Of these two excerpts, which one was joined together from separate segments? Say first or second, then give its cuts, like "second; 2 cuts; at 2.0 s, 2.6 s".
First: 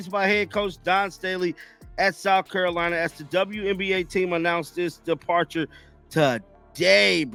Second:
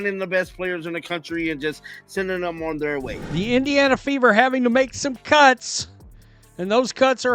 second; 1 cut; at 3.2 s